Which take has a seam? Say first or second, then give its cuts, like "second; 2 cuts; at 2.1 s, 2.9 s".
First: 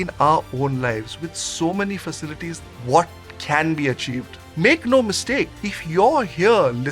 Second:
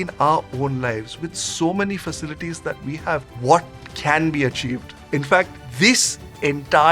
first; 2 cuts; at 2.6 s, 4.4 s